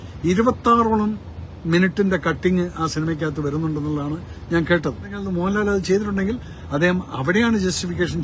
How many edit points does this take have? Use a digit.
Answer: 1